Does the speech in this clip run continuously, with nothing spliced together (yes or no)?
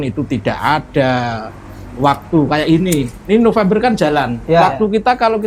yes